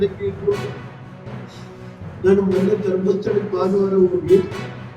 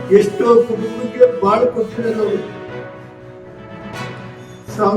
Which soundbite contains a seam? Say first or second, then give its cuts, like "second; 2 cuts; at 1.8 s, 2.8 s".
second; 2 cuts; at 2.5 s, 4.0 s